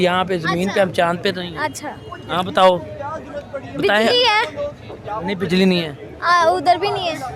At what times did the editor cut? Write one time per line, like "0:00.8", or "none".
none